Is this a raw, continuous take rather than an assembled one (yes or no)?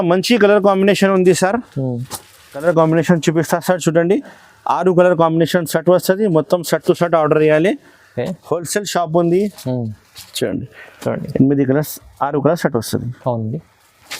no